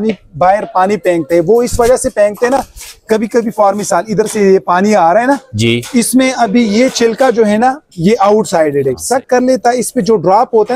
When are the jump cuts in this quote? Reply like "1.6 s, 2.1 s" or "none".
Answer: 9.0 s